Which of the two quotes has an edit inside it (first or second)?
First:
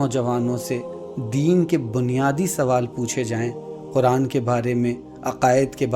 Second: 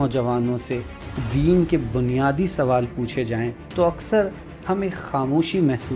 second